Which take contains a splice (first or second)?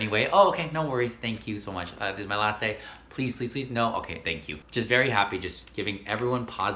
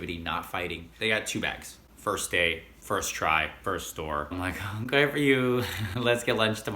second